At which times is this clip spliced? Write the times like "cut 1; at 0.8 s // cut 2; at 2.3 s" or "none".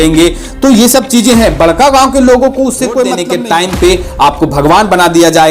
cut 1; at 3.2 s